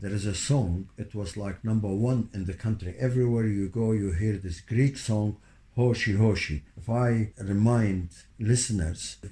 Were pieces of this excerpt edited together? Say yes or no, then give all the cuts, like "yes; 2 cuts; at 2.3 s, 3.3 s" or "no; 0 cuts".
yes; 1 cut; at 7.1 s